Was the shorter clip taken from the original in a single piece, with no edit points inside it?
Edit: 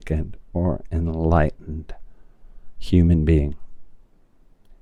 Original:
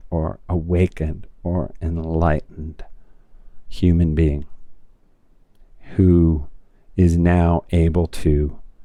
yes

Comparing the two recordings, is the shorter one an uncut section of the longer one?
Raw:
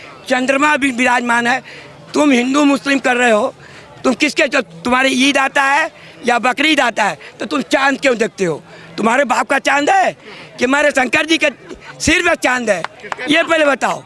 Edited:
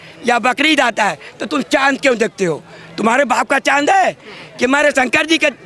yes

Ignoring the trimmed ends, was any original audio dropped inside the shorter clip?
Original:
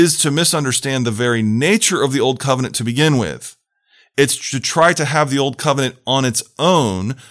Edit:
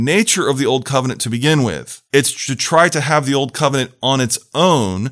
yes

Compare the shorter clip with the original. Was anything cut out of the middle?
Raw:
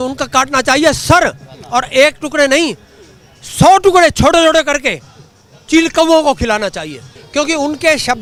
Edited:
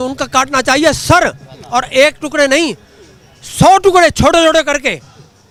no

